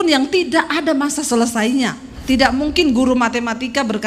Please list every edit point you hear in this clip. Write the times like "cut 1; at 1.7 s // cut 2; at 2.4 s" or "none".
cut 1; at 2.1 s